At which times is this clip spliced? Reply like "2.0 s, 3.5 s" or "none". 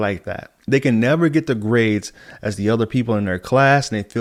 none